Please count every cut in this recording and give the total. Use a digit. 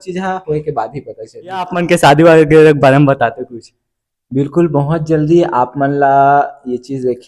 1